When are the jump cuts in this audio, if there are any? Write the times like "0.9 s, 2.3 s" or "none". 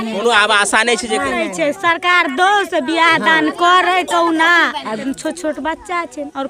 5.0 s